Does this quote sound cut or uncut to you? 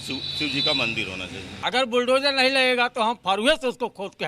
cut